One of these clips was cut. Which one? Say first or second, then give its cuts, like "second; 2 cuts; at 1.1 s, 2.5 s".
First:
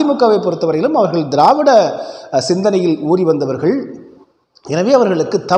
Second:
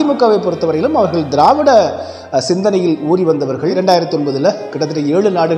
second; 1 cut; at 3.7 s